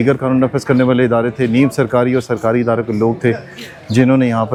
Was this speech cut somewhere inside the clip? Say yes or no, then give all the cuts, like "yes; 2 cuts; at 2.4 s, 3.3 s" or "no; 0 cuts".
no; 0 cuts